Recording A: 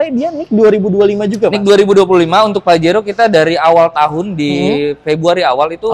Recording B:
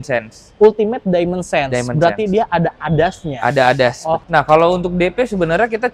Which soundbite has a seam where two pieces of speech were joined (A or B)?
B